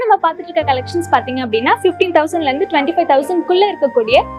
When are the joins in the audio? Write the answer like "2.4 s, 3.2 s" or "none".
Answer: none